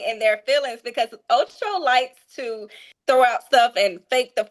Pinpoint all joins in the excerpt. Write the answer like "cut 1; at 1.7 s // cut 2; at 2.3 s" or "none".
cut 1; at 2.9 s